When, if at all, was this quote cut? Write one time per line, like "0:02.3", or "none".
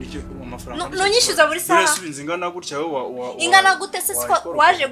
none